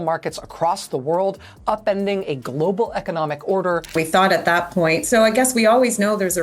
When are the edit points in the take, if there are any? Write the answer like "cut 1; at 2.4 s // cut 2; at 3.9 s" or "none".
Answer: cut 1; at 3.9 s